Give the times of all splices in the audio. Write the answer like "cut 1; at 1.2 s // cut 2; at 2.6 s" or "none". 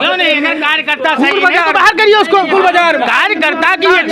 none